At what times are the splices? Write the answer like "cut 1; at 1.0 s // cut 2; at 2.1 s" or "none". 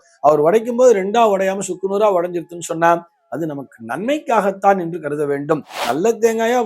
cut 1; at 5.7 s